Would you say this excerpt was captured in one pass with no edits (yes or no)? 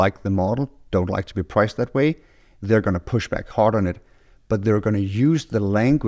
yes